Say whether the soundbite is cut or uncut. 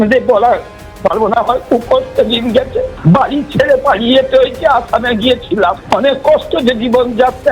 cut